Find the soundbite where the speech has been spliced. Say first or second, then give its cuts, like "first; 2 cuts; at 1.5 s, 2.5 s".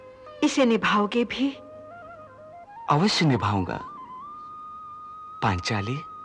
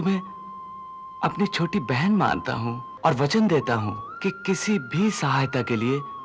second; 2 cuts; at 2.9 s, 4.0 s